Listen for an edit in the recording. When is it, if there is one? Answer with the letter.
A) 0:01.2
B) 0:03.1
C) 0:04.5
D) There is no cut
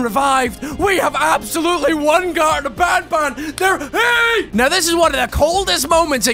C